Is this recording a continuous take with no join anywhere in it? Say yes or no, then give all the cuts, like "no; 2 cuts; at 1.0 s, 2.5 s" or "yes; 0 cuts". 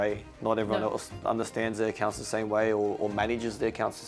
yes; 0 cuts